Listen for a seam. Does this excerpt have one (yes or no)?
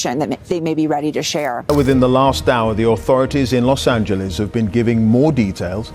yes